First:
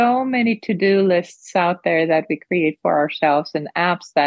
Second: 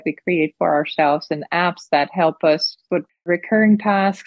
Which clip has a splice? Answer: second; 1 cut; at 3.0 s

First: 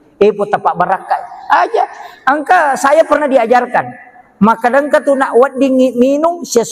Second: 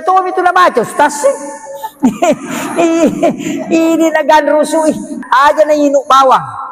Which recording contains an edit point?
second; 1 cut; at 5.1 s

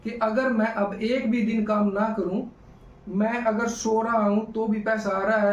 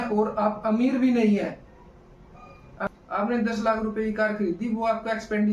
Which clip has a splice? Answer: second; 1 cut; at 2.8 s

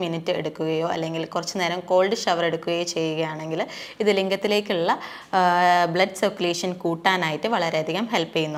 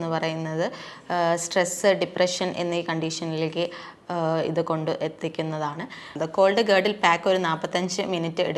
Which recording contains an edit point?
second; 1 cut; at 6.2 s

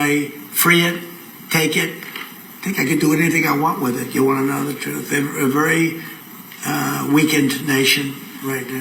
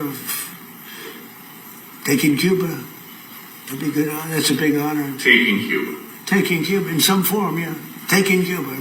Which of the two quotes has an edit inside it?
second; 1 cut; at 7.1 s

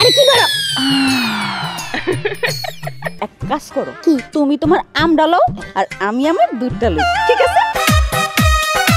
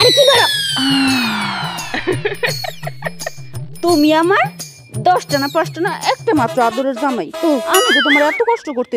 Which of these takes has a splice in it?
first; 2 cuts; at 3.1 s, 7.7 s

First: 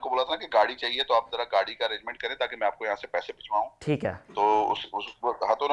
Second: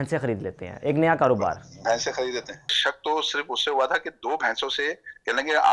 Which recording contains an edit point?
second; 1 cut; at 2.8 s

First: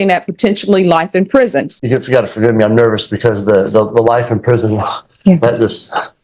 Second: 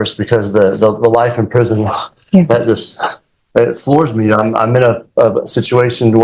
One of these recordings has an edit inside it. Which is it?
first; 1 cut; at 1.8 s

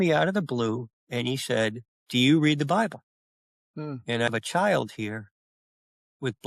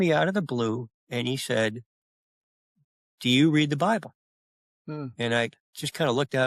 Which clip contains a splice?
first; 2 cuts; at 1.9 s, 4.3 s

